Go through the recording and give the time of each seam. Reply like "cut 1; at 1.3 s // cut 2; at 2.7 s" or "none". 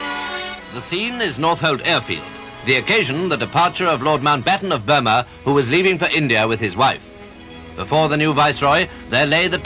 cut 1; at 3.3 s